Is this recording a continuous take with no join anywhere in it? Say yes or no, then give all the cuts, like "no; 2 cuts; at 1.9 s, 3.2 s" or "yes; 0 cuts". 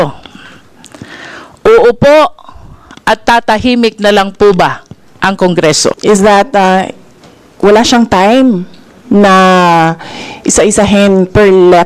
no; 1 cut; at 6.0 s